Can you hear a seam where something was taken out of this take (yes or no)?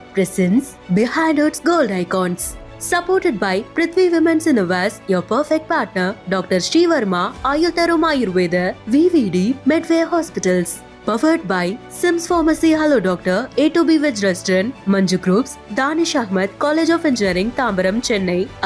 no